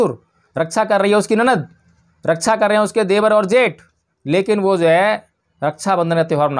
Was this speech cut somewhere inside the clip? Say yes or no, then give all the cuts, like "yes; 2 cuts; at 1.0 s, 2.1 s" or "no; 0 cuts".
no; 0 cuts